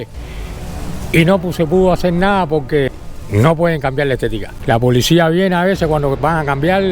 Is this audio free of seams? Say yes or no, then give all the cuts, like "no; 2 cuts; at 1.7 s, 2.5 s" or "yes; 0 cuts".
no; 2 cuts; at 2.9 s, 4.5 s